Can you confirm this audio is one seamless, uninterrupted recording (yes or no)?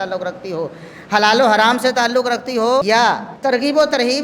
no